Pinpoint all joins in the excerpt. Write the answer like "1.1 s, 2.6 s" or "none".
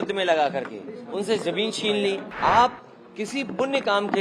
2.3 s